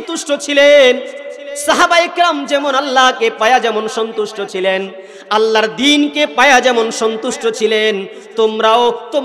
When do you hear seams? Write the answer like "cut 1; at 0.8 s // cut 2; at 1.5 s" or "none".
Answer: none